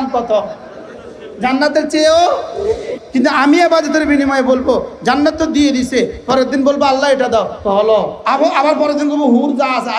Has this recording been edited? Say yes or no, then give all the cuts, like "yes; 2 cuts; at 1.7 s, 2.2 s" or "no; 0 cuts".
yes; 1 cut; at 8.2 s